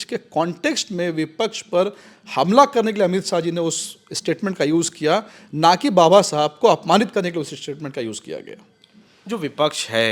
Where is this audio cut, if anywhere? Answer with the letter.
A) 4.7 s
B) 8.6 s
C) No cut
C